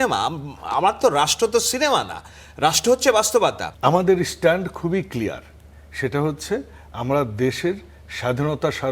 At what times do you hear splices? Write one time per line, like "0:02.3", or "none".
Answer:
0:03.7